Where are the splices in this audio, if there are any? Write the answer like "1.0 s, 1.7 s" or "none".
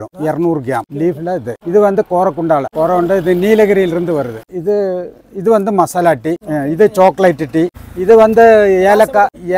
0.9 s, 4.4 s